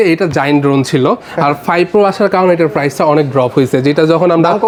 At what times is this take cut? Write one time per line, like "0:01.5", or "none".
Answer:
none